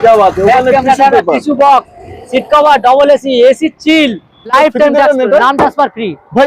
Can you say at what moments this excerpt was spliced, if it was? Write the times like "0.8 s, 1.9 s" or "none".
4.5 s